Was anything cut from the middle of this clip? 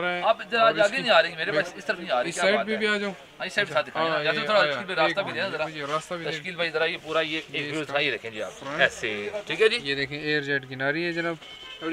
no; 0 cuts

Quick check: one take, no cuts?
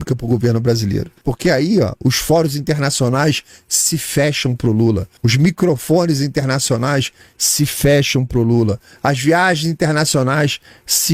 no; 2 cuts; at 1.1 s, 5.2 s

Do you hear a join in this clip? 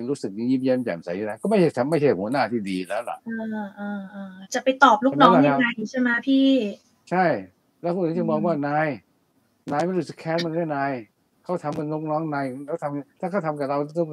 no; 0 cuts

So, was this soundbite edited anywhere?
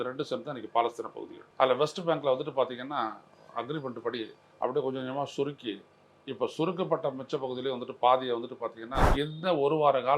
yes; 1 cut; at 9.0 s

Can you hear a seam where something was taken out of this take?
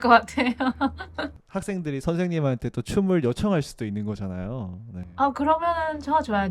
yes; 1 cut; at 1.2 s

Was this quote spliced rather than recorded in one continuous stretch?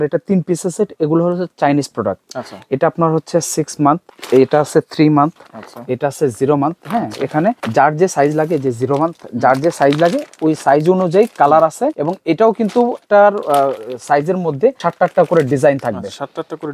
no; 0 cuts

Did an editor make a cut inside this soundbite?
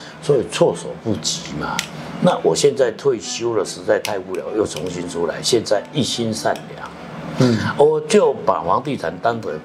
no; 0 cuts

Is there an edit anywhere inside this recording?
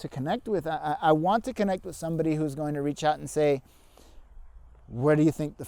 no; 0 cuts

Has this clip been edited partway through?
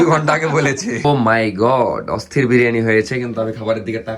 yes; 1 cut; at 1.0 s

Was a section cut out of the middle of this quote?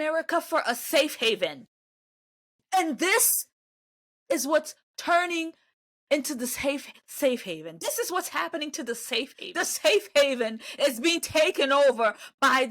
yes; 1 cut; at 9.4 s

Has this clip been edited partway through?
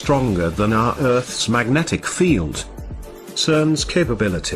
yes; 1 cut; at 3.3 s

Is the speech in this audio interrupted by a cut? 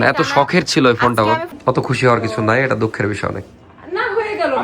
yes; 1 cut; at 1.5 s

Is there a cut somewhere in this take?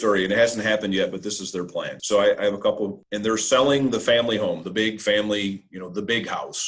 yes; 2 cuts; at 2.0 s, 3.0 s

